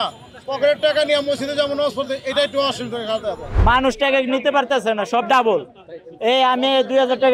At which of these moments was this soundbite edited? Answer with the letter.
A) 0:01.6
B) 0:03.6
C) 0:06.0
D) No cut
B